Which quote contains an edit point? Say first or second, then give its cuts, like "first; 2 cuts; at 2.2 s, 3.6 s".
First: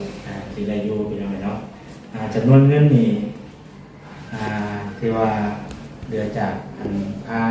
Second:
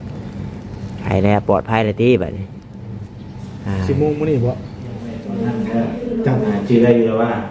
second; 1 cut; at 5.2 s